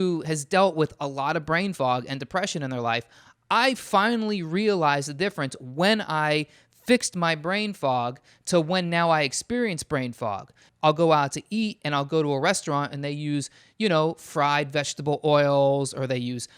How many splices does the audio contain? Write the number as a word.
one